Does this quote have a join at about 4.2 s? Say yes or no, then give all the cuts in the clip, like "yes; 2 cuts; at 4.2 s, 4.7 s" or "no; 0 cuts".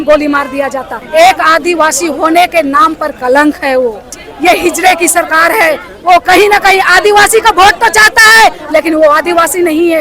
yes; 2 cuts; at 0.9 s, 4.2 s